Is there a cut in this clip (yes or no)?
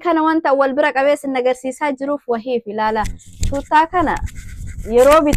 no